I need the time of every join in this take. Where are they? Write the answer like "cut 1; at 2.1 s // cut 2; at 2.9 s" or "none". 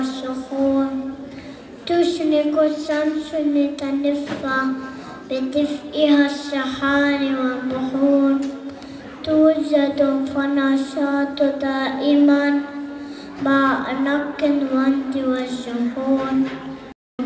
cut 1; at 12.0 s